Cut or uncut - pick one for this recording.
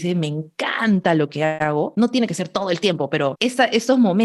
cut